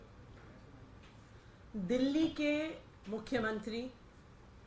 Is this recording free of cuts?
yes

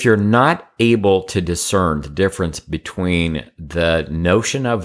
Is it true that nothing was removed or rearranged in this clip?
yes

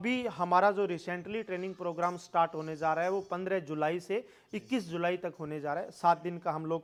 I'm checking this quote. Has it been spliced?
no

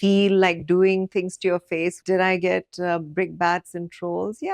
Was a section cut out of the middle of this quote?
yes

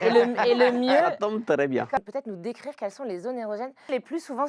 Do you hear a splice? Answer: yes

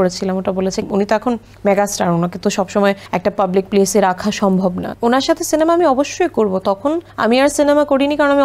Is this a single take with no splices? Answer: no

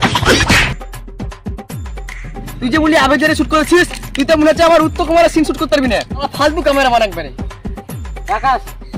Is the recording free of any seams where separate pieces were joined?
yes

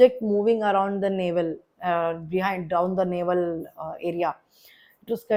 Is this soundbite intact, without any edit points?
yes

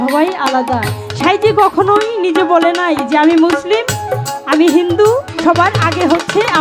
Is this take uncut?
no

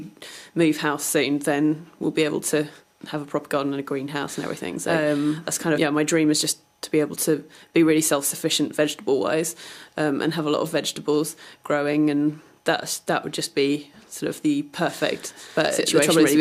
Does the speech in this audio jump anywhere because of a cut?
no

